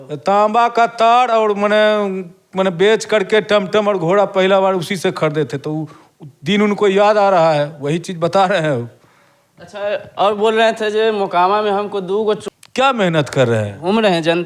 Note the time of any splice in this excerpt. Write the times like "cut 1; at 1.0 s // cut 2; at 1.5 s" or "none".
cut 1; at 12.4 s